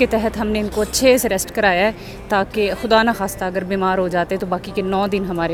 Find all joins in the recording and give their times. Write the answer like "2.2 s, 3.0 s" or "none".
none